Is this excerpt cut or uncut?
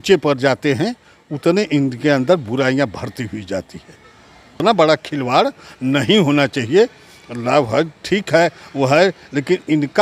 cut